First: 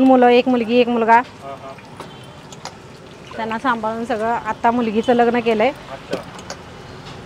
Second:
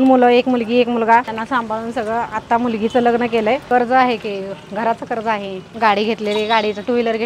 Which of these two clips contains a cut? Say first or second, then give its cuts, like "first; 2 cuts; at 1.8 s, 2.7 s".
second; 3 cuts; at 1.3 s, 3.6 s, 5.7 s